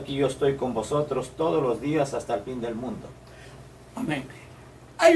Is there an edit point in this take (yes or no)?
yes